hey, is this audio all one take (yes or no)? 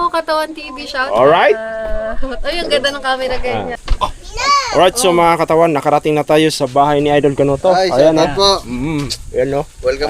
no